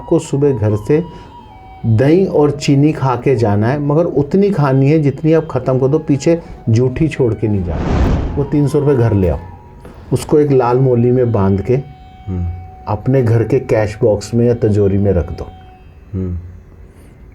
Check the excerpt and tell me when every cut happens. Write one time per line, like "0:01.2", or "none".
0:07.9